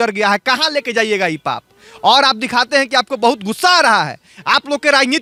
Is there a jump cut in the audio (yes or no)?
no